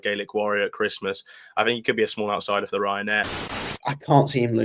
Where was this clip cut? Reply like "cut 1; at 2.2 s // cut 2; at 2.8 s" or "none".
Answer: cut 1; at 3.4 s